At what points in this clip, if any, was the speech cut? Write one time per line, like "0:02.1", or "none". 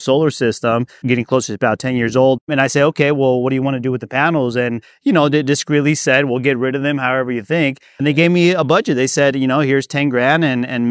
0:01.0
0:02.5
0:08.0